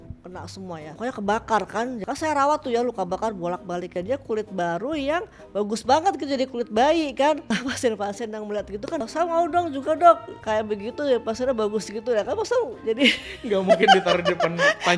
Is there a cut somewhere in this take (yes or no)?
yes